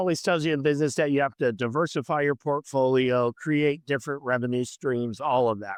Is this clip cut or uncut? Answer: uncut